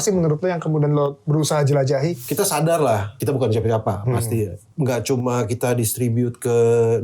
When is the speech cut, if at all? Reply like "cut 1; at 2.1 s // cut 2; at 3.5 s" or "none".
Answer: cut 1; at 2.2 s // cut 2; at 3.2 s // cut 3; at 4.6 s